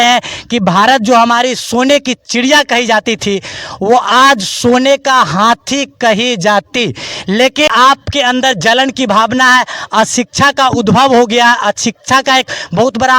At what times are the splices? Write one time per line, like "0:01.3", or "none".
0:07.7